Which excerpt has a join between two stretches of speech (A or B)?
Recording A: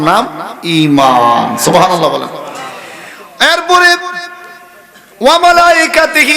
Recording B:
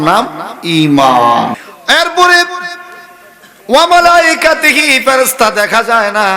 B